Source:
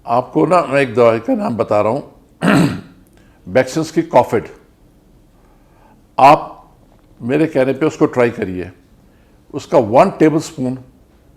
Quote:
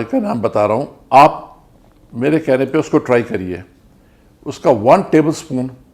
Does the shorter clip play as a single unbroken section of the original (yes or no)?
no